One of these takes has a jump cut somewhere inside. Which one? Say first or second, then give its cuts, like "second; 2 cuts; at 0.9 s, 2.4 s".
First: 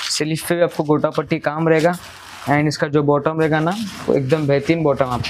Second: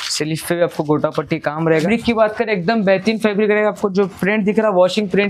second; 1 cut; at 1.8 s